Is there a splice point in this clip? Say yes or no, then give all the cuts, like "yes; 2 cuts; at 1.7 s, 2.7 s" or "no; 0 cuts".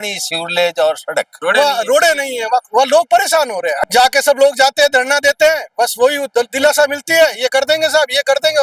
yes; 2 cuts; at 1.3 s, 3.8 s